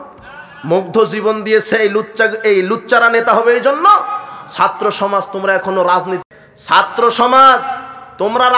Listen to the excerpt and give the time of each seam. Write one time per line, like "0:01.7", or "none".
0:06.3